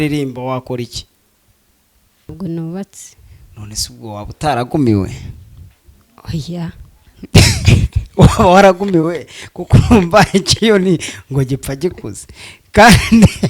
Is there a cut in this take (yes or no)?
yes